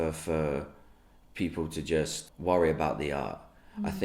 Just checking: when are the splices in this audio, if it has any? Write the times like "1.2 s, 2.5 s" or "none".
2.2 s